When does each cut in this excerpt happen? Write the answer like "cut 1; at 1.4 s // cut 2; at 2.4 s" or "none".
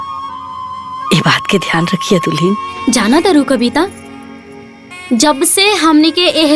cut 1; at 2.7 s